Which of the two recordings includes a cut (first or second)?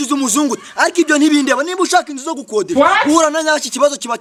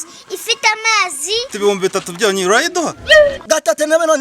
second